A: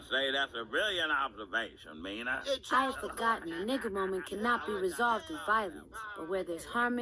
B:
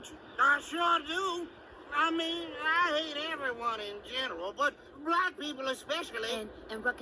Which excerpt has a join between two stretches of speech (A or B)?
A